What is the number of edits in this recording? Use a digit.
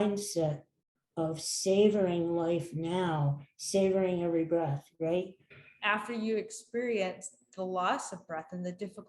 1